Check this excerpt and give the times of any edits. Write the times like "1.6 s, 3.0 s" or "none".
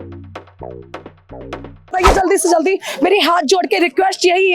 1.9 s